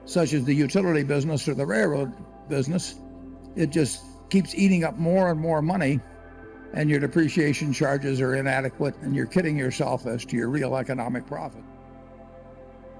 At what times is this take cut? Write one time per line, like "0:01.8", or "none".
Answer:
0:12.0